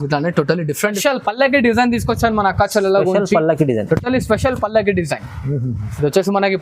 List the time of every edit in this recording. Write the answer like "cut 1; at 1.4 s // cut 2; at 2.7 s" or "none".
cut 1; at 1.0 s